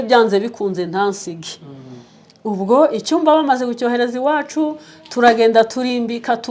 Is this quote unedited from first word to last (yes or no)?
yes